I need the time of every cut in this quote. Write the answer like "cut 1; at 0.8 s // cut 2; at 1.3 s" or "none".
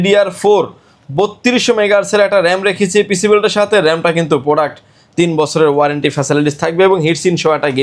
none

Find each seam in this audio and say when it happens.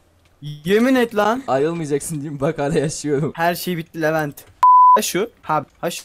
cut 1; at 4.5 s // cut 2; at 5.0 s

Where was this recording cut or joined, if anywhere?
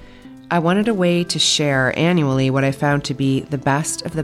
none

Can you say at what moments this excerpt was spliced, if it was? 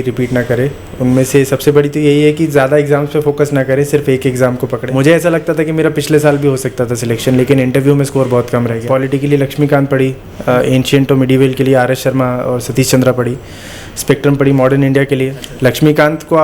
cut 1; at 4.8 s // cut 2; at 8.8 s // cut 3; at 15.4 s

